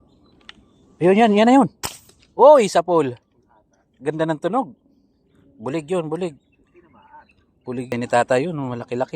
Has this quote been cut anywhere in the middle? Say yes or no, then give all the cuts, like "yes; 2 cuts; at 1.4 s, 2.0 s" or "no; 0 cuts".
yes; 3 cuts; at 1.4 s, 2.8 s, 7.9 s